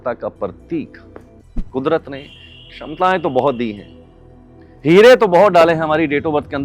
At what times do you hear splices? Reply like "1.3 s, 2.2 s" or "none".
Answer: 1.3 s